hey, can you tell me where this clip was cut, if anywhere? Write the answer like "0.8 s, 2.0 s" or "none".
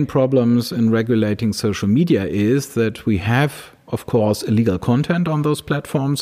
none